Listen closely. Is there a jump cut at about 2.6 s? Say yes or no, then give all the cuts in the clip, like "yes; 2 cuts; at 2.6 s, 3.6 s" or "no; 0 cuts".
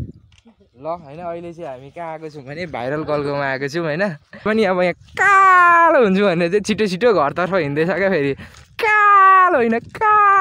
no; 1 cut; at 4.5 s